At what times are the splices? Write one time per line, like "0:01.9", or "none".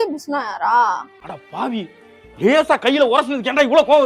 0:01.1